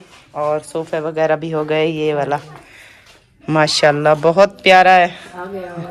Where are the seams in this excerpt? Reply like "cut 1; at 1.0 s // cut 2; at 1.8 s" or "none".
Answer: none